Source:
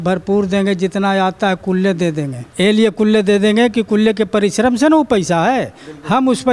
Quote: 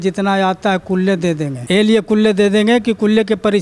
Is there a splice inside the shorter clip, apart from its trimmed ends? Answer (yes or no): yes